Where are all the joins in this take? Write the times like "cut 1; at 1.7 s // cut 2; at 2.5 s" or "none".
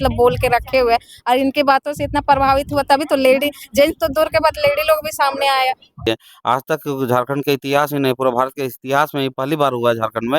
cut 1; at 6.1 s